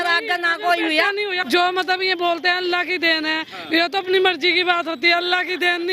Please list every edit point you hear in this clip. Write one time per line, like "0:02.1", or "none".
0:01.4